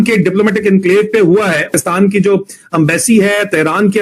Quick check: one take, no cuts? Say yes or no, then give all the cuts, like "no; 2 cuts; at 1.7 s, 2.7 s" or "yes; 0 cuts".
no; 1 cut; at 1.7 s